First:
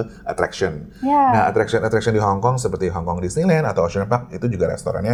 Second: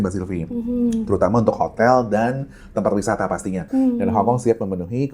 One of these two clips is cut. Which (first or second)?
second